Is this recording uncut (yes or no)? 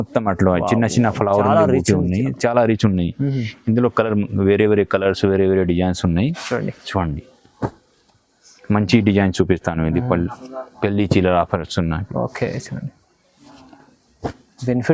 yes